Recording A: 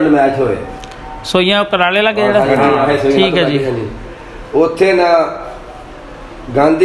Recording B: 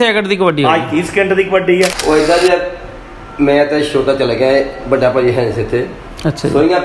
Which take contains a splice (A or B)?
B